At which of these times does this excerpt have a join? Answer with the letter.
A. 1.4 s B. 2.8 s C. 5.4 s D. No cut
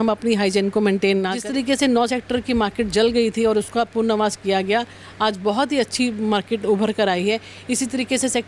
A